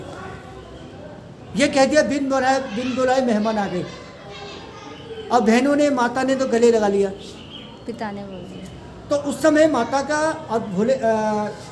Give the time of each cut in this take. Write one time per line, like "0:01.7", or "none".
none